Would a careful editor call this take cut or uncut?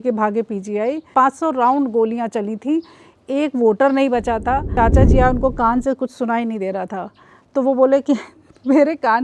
cut